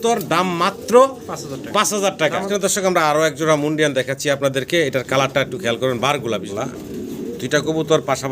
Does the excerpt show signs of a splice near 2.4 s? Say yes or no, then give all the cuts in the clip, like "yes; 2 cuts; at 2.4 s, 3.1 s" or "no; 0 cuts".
yes; 2 cuts; at 2.4 s, 6.5 s